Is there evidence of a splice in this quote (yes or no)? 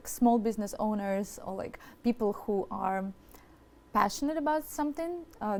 no